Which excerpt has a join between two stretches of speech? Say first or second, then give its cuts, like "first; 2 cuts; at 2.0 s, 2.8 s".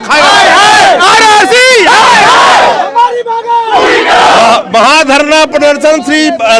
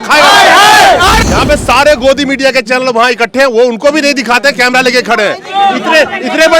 second; 1 cut; at 1.2 s